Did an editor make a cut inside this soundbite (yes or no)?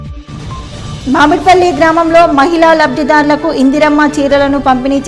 yes